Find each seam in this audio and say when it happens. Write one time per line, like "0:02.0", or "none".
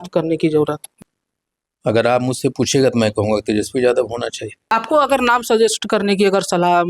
0:00.9
0:04.5

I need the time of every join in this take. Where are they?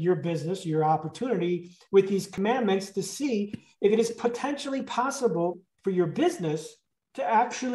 0:05.6

